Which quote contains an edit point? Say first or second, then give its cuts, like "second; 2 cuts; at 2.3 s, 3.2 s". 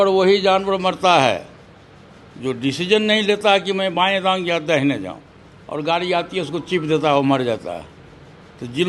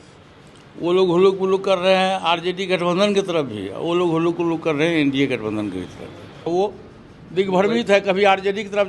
second; 1 cut; at 6.4 s